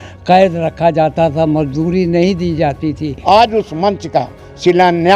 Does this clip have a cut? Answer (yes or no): yes